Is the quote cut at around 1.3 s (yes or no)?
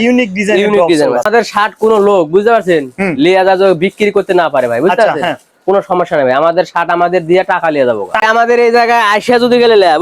yes